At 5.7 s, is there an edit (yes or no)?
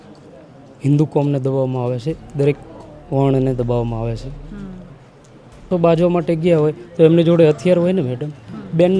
yes